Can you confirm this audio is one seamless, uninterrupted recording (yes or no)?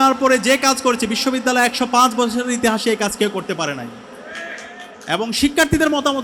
yes